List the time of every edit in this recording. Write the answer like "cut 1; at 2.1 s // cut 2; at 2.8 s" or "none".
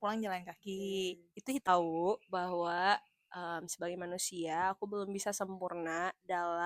cut 1; at 1.7 s